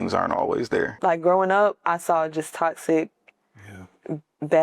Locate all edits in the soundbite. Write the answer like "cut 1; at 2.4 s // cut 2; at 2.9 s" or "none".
cut 1; at 0.9 s